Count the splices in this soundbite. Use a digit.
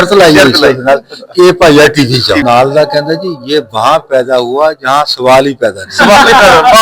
1